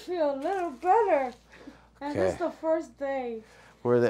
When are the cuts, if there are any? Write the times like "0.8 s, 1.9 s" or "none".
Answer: none